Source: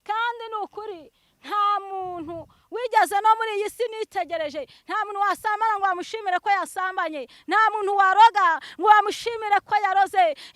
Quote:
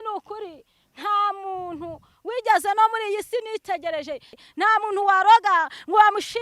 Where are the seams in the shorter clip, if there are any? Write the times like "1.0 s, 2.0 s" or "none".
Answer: 4.3 s